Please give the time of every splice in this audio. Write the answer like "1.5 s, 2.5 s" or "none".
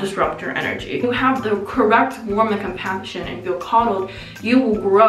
1.0 s